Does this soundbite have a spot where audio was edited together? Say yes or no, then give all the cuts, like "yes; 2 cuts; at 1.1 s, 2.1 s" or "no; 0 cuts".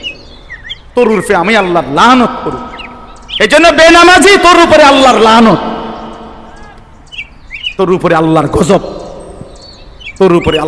no; 0 cuts